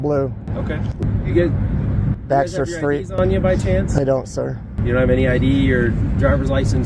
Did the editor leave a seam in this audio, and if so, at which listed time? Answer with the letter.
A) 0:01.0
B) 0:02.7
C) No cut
A